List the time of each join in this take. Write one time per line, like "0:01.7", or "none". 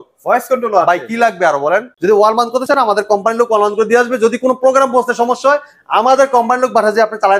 0:01.9